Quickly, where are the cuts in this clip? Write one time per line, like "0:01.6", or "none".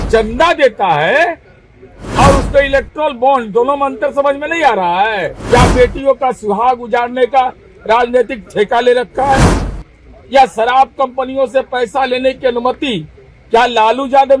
0:05.3